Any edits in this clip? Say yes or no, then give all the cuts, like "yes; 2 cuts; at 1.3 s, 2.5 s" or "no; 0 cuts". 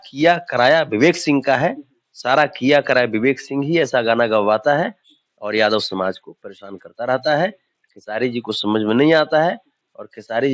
no; 0 cuts